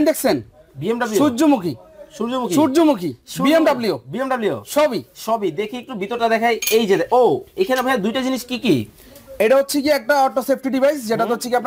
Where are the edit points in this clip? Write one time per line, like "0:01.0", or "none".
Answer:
none

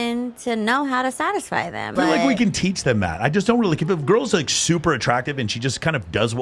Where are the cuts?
0:01.9
0:05.2

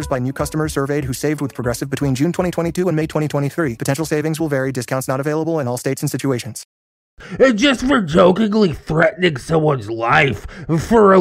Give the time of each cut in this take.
0:07.1

